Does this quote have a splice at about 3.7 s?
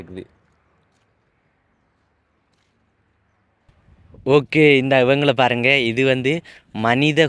yes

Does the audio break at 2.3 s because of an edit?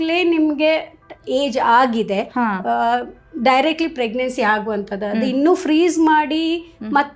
no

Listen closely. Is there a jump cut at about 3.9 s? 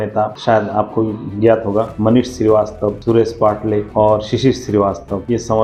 no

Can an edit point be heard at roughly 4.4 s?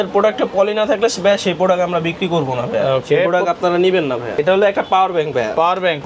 yes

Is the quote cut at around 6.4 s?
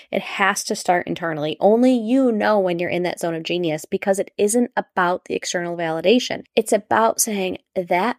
yes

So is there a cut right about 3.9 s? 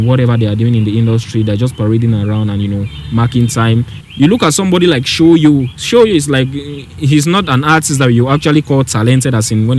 yes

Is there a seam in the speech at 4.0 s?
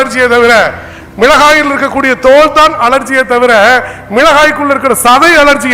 no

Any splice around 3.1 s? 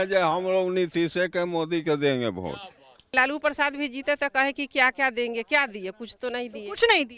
yes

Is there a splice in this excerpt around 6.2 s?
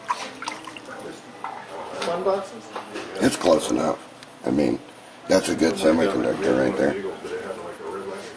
no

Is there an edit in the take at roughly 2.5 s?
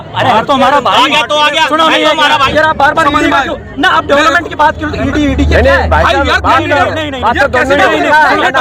yes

